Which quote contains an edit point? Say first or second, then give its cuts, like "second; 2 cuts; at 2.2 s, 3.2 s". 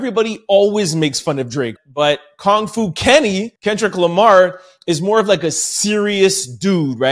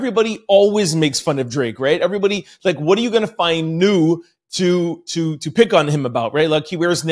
first; 2 cuts; at 1.7 s, 3.5 s